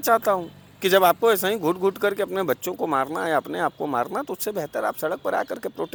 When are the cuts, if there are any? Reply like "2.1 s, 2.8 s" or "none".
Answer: none